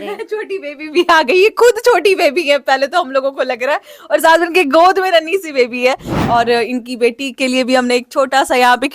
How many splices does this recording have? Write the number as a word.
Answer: one